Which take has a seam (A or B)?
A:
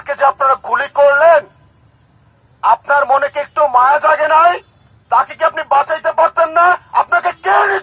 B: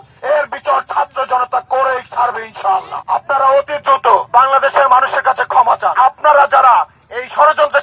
B